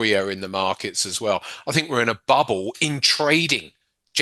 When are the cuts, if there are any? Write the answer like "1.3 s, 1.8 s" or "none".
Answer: none